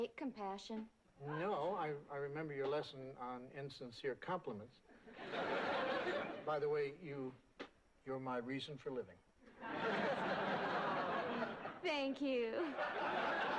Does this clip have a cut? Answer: no; 0 cuts

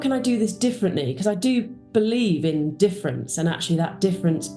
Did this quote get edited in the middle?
no; 0 cuts

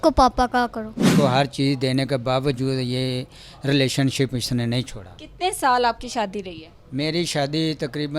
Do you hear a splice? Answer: yes; 1 cut; at 1.0 s

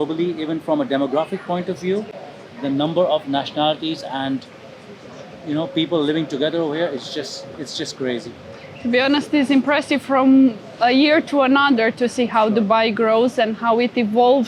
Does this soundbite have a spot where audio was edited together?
no; 0 cuts

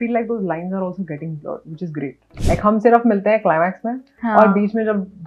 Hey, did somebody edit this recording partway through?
yes; 1 cut; at 2.2 s

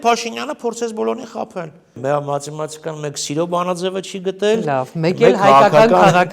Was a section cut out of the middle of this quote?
yes; 1 cut; at 2.0 s

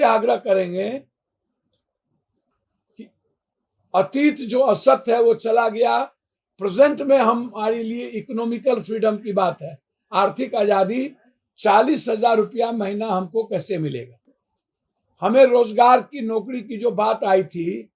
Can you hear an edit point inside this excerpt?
no; 0 cuts

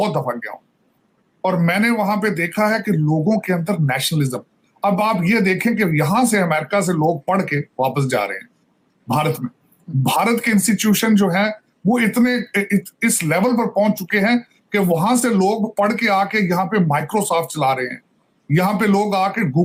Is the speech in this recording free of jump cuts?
yes; 0 cuts

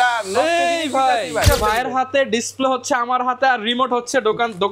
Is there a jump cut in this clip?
yes; 1 cut; at 1.5 s

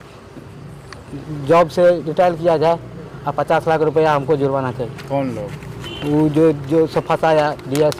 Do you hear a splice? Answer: no; 0 cuts

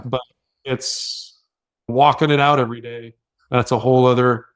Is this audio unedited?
no; 1 cut; at 1.9 s

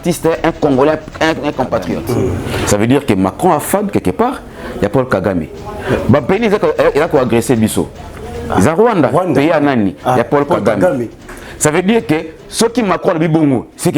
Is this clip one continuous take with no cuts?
no; 1 cut; at 2.0 s

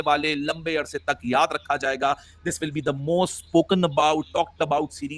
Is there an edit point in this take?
no; 0 cuts

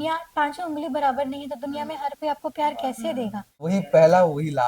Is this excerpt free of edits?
no; 1 cut; at 3.6 s

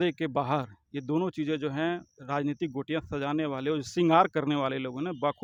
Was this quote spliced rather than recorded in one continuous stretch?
no; 0 cuts

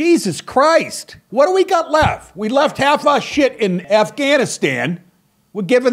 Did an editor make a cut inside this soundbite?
yes; 2 cuts; at 1.2 s, 3.8 s

